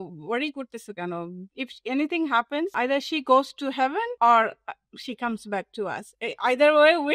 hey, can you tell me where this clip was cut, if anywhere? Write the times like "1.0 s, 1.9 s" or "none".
1.4 s, 2.7 s, 4.1 s